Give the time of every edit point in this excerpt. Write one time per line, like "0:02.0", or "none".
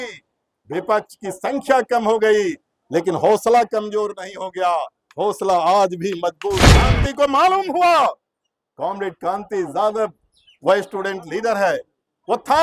0:06.9